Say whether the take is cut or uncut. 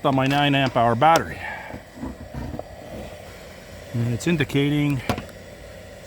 cut